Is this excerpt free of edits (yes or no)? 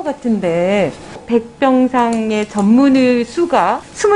no